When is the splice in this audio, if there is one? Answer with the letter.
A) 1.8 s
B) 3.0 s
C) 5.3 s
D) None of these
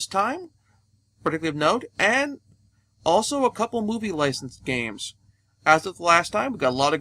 D